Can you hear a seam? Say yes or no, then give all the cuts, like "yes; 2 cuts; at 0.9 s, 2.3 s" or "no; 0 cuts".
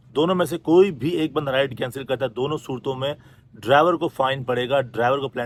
no; 0 cuts